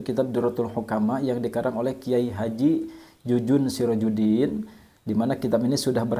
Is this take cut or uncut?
uncut